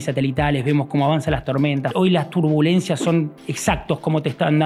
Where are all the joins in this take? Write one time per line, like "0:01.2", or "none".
0:01.9